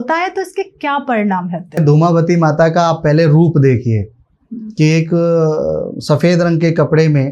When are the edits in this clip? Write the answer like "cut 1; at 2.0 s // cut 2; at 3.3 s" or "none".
cut 1; at 1.8 s